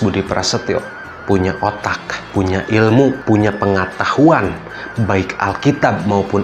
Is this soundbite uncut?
yes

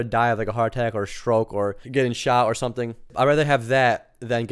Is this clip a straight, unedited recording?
no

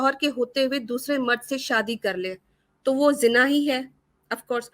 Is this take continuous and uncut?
yes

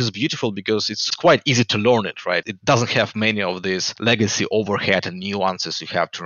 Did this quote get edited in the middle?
yes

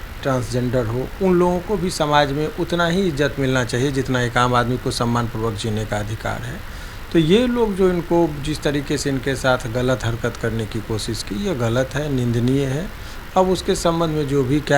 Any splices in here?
no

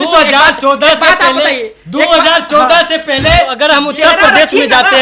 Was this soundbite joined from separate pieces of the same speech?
yes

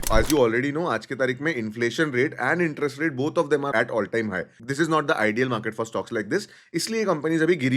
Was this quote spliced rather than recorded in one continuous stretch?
yes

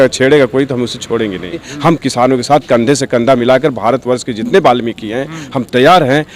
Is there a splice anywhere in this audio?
yes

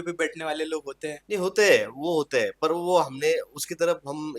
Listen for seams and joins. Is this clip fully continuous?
yes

